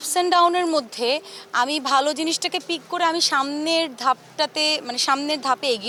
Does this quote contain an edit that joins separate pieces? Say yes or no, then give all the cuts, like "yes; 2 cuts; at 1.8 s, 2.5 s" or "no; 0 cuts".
no; 0 cuts